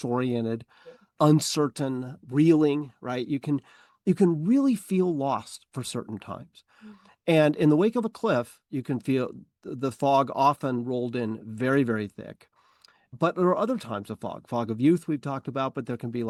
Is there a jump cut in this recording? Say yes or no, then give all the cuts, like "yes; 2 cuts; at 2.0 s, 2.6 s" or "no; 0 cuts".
no; 0 cuts